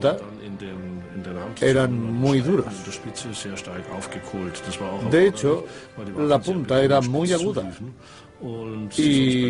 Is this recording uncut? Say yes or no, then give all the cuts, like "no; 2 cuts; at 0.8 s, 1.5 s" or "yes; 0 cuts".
no; 1 cut; at 2.0 s